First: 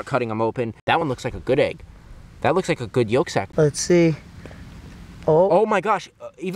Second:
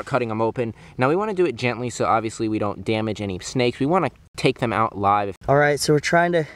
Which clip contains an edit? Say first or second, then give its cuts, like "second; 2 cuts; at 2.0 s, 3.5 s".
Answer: first; 2 cuts; at 1.0 s, 3.7 s